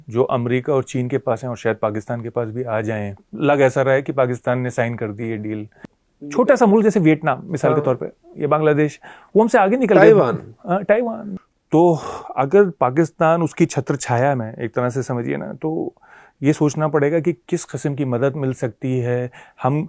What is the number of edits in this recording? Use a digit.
3